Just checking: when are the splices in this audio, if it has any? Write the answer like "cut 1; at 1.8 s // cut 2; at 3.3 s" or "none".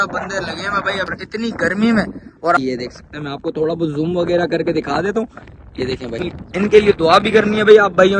cut 1; at 1.1 s // cut 2; at 2.6 s // cut 3; at 6.3 s